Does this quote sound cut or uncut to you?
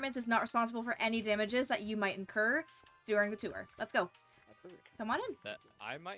uncut